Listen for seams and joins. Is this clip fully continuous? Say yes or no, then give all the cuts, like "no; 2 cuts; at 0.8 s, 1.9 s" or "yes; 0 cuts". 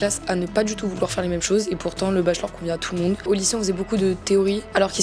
no; 1 cut; at 3.2 s